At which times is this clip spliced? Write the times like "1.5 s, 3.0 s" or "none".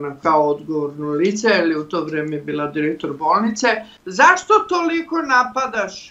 3.9 s